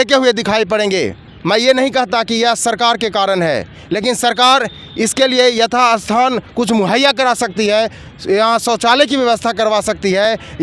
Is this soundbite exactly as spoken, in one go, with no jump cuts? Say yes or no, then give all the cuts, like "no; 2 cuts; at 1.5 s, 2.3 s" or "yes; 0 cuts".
yes; 0 cuts